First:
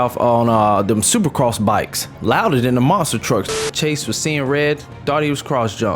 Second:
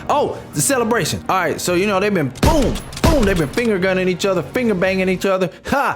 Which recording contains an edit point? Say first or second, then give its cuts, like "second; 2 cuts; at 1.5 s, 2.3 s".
first; 2 cuts; at 2.2 s, 3.6 s